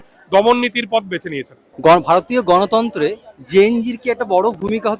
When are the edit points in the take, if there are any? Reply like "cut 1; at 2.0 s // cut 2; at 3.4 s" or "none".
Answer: none